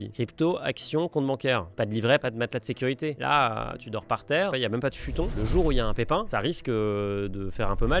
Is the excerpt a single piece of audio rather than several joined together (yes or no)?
yes